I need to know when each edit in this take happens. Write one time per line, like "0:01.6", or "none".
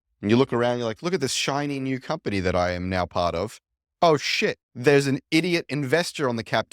0:04.7